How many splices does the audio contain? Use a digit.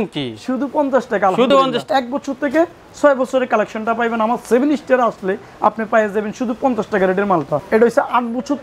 2